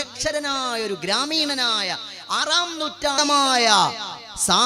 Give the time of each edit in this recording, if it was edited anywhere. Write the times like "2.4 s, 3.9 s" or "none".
3.2 s